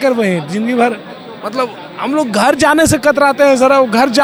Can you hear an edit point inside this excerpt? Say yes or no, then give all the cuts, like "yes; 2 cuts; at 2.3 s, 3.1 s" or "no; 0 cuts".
no; 0 cuts